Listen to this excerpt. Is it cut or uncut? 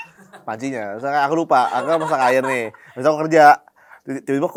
uncut